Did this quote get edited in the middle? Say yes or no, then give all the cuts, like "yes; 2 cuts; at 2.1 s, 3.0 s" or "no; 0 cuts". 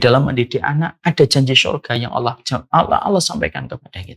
yes; 1 cut; at 0.9 s